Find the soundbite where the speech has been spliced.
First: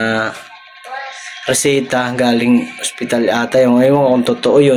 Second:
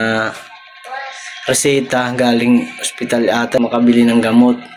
second; 1 cut; at 3.6 s

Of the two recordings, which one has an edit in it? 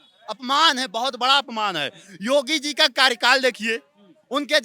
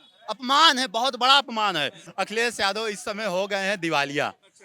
second; 1 cut; at 2.0 s

